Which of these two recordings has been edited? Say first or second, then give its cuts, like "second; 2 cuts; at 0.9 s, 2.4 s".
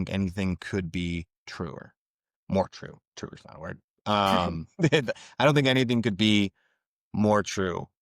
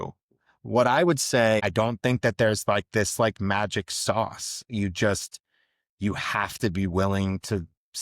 second; 1 cut; at 1.6 s